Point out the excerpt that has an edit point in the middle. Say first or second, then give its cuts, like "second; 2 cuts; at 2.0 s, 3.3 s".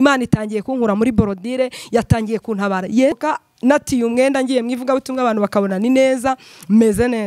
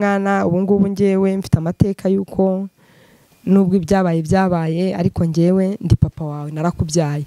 first; 1 cut; at 3.2 s